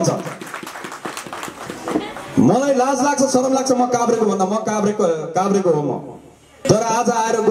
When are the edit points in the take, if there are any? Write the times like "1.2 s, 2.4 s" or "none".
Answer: 6.6 s